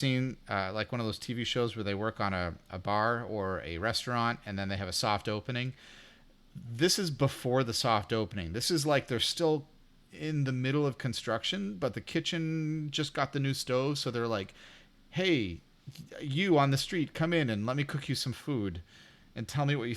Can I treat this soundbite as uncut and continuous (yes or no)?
yes